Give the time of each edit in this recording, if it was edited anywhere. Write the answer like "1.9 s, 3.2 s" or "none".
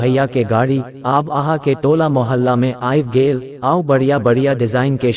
3.5 s